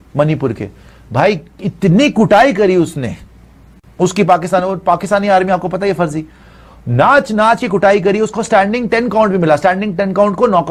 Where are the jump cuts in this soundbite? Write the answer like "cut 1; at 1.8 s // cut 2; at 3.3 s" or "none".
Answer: none